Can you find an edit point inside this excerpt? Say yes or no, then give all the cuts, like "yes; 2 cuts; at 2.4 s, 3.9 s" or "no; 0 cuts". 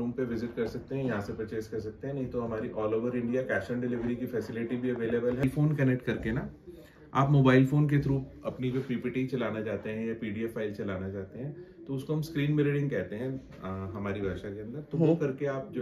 yes; 1 cut; at 5.4 s